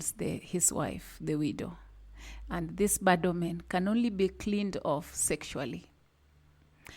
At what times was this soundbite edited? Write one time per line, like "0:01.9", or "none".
none